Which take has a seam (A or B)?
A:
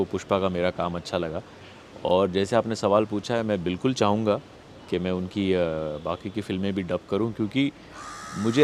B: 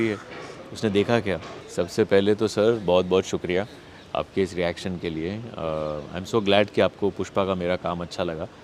B